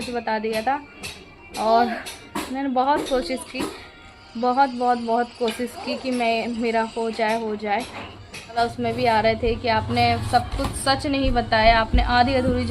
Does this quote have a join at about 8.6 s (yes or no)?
yes